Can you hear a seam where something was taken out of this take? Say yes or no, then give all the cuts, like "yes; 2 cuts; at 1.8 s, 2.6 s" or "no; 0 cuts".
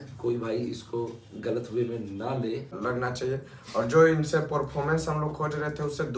yes; 1 cut; at 2.8 s